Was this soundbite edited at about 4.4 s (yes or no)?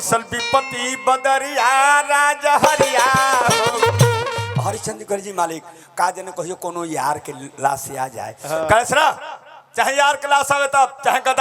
yes